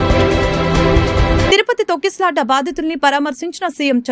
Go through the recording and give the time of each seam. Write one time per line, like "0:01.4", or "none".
0:01.5